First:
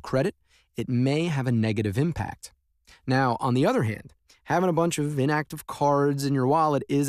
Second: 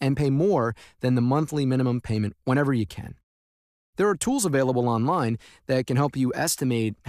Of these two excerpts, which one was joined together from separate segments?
first; 1 cut; at 5.9 s

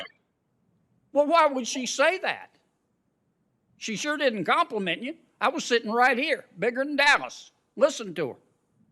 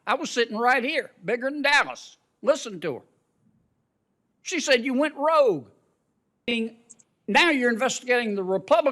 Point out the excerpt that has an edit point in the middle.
second; 1 cut; at 6.5 s

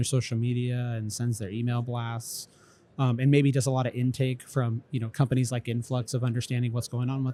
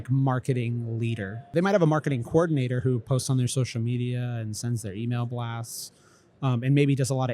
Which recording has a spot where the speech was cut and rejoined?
second; 1 cut; at 1.5 s

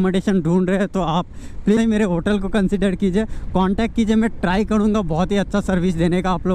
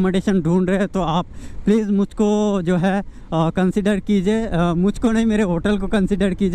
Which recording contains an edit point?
first; 1 cut; at 1.8 s

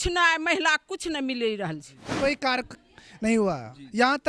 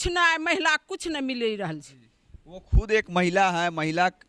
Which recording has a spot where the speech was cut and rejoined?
first; 1 cut; at 2.2 s

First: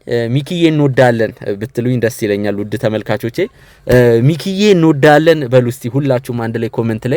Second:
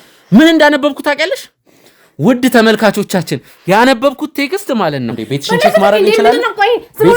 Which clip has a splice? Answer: second; 1 cut; at 5.2 s

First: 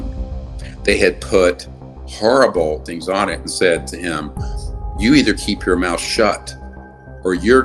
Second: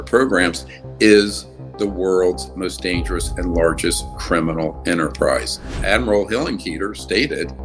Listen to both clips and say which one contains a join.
second; 1 cut; at 5.7 s

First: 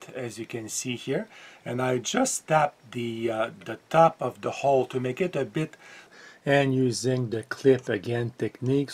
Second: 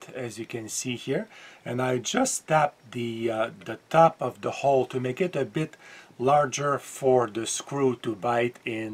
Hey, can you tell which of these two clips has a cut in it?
first; 1 cut; at 6.1 s

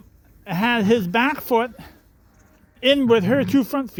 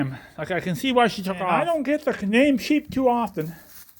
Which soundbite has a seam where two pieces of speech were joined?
second; 1 cut; at 1.6 s

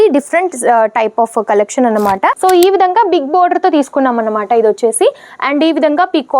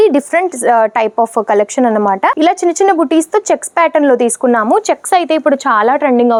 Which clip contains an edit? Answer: first; 1 cut; at 2.3 s

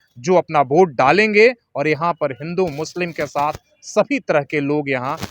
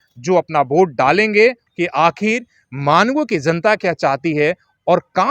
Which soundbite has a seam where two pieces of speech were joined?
second; 1 cut; at 1.6 s

